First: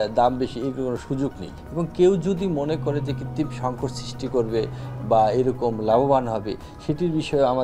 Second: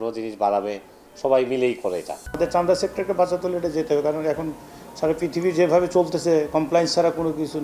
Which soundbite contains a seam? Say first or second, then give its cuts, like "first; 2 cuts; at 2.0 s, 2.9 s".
second; 1 cut; at 2.2 s